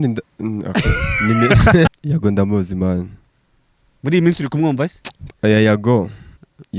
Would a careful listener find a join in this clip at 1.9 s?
yes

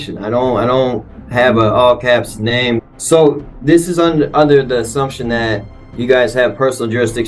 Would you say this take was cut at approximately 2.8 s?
yes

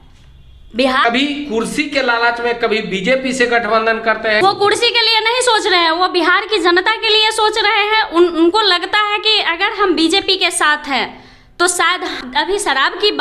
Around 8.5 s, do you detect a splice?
no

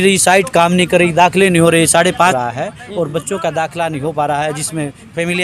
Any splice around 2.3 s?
yes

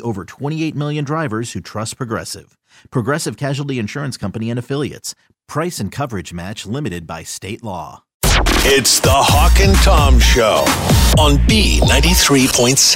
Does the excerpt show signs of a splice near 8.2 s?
yes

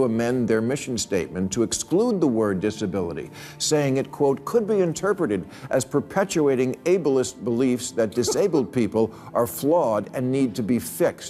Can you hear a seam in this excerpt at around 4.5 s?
no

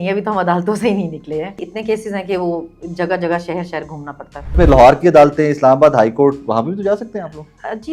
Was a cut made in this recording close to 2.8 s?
no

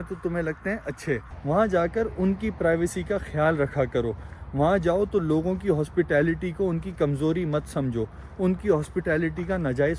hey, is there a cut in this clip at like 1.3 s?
yes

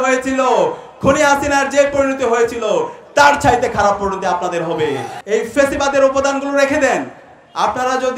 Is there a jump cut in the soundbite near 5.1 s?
yes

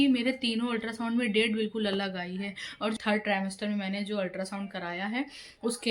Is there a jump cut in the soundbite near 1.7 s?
no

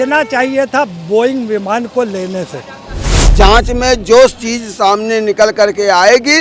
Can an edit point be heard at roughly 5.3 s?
no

